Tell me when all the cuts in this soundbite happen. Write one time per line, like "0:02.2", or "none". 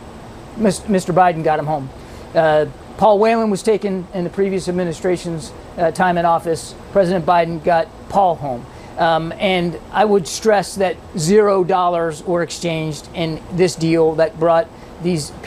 none